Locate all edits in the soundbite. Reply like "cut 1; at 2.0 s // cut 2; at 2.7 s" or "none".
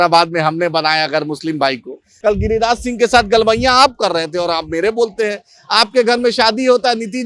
cut 1; at 2.0 s